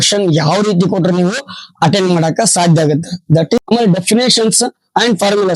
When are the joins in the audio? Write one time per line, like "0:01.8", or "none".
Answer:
0:03.6

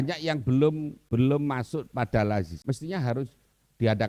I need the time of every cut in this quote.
0:00.9
0:02.6

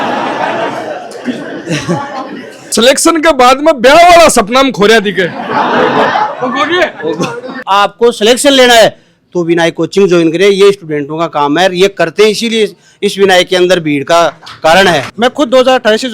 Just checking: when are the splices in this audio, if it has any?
0:02.7
0:07.6
0:15.1

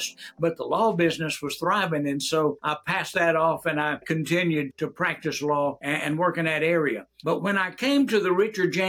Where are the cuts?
0:02.6
0:04.0
0:04.7
0:05.8
0:07.1

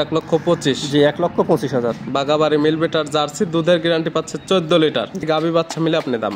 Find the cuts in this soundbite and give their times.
0:05.2

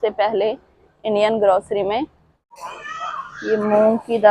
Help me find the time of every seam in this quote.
0:02.6

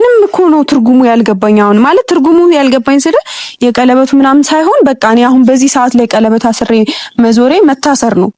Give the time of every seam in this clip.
none

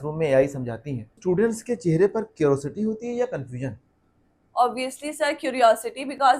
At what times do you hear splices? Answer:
0:01.2

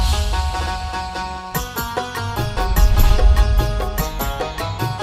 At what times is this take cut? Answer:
0:03.9

